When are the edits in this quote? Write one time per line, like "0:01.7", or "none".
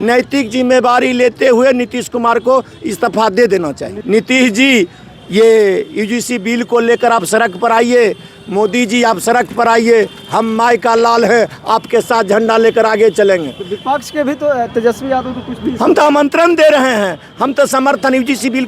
0:03.9